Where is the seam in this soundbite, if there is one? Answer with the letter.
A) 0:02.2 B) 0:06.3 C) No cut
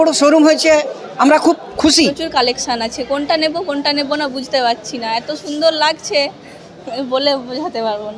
A